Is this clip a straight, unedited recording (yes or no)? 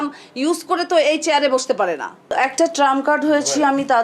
no